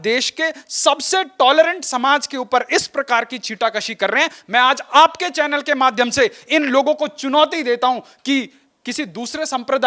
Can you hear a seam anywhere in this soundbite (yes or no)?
no